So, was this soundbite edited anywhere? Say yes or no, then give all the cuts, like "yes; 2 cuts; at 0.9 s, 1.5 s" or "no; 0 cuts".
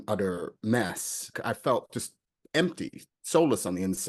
yes; 1 cut; at 1.3 s